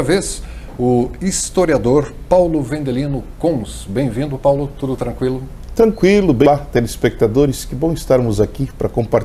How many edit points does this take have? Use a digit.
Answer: 1